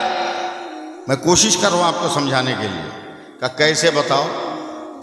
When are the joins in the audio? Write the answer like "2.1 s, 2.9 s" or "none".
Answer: none